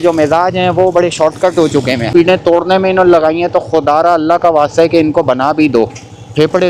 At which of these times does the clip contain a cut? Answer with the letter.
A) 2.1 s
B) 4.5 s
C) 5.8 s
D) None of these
A